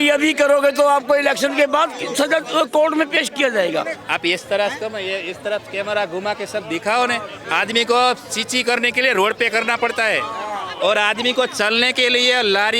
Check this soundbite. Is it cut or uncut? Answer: cut